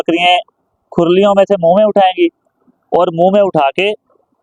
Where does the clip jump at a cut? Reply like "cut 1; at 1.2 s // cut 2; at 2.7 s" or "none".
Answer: none